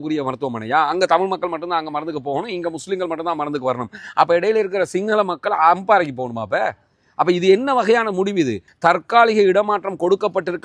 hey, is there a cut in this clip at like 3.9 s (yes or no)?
no